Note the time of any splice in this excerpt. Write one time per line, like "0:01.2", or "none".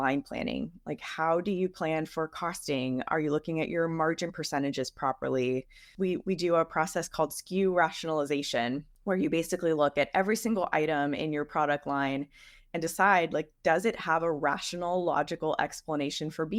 none